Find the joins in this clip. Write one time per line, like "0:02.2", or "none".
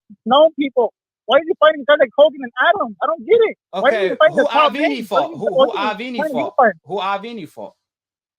none